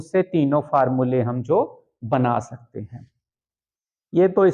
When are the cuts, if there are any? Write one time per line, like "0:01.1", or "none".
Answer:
none